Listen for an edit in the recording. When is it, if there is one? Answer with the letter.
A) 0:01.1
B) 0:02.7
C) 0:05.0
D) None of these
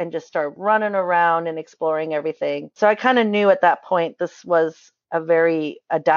B